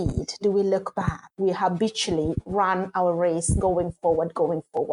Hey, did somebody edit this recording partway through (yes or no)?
yes